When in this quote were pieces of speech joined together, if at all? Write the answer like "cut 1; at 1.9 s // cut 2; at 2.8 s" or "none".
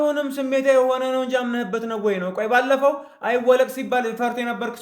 none